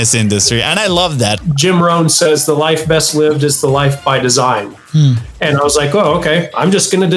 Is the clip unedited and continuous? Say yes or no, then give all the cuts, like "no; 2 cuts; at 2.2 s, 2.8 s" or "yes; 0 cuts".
no; 1 cut; at 1.4 s